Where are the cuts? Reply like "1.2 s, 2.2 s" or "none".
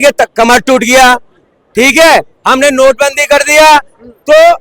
none